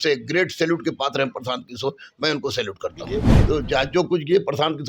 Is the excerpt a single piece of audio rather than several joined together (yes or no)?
no